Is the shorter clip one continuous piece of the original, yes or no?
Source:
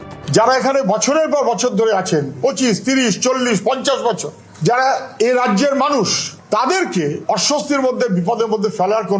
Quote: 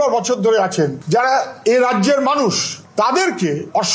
no